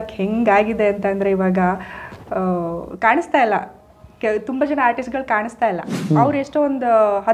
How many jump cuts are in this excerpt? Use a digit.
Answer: 1